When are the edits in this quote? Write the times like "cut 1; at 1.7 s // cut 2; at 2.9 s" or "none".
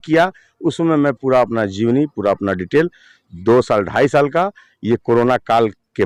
none